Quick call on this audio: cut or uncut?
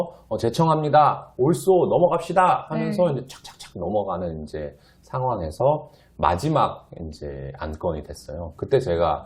uncut